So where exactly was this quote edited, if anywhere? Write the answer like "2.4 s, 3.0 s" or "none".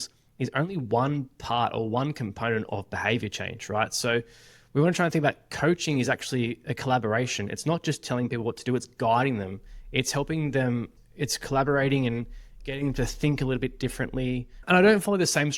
14.6 s